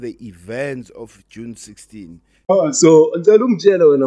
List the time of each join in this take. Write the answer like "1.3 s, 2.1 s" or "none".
2.5 s